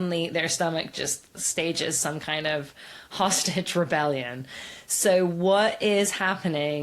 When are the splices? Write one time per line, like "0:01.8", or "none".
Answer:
none

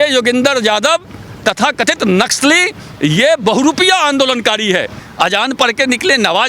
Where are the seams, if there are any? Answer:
0:05.0

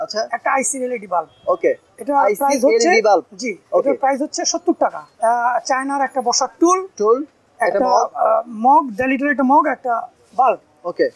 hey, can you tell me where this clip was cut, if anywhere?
0:05.0

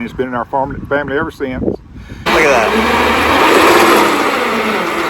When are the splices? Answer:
0:02.3

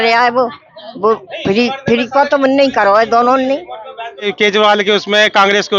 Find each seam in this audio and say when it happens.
0:04.3

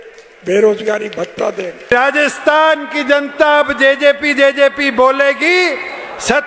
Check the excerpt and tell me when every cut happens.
0:01.9

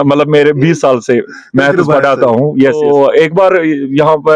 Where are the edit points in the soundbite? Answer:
0:02.8

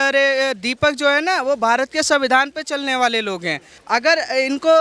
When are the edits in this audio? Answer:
0:03.7

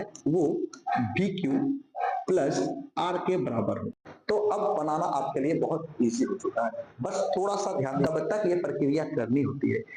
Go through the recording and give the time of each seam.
0:03.9
0:08.1

